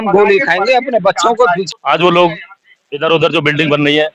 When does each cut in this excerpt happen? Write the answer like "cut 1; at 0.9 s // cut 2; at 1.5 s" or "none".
cut 1; at 1.7 s